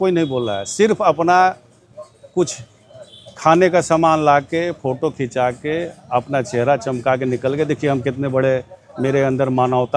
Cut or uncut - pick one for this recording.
uncut